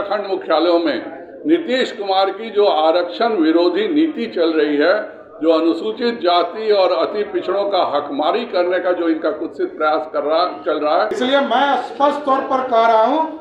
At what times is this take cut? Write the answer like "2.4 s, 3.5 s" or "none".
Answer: 11.1 s